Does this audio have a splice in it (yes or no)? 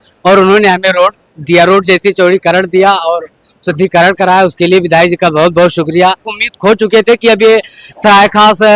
no